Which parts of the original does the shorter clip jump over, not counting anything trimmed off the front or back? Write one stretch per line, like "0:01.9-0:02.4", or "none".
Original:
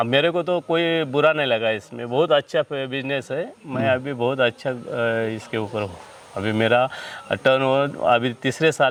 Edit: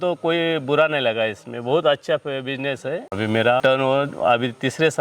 0:03.6-0:07.0